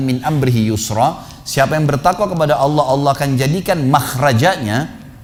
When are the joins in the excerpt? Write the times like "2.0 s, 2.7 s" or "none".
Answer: none